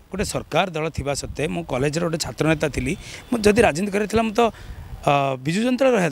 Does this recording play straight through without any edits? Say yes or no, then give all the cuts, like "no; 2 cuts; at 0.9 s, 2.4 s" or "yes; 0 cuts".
yes; 0 cuts